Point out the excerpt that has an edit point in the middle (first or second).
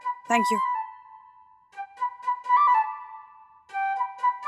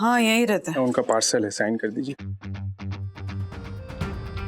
second